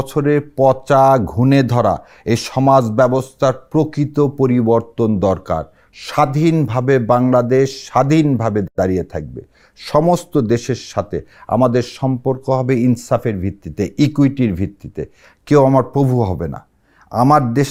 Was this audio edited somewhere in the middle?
no; 0 cuts

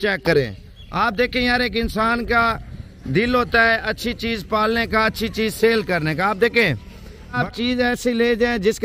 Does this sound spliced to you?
yes; 1 cut; at 7.4 s

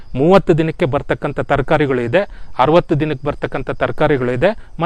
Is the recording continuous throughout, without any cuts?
yes; 0 cuts

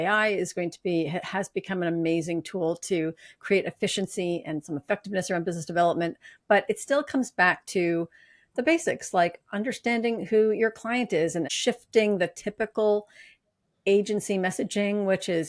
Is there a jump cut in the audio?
yes; 1 cut; at 11.5 s

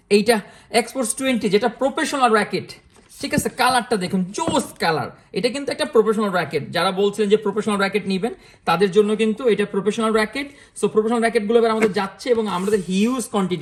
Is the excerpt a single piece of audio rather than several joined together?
yes; 0 cuts

